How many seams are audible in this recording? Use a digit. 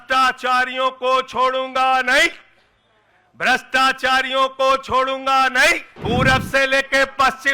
1